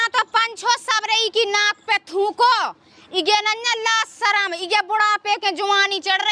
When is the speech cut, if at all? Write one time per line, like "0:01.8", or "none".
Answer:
none